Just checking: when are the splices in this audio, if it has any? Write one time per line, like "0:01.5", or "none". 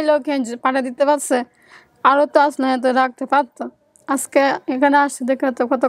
none